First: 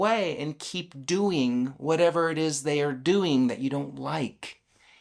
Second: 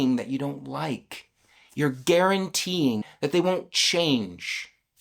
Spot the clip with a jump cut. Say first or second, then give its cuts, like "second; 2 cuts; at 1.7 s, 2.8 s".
second; 1 cut; at 3.1 s